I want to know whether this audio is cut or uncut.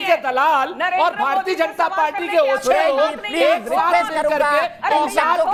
uncut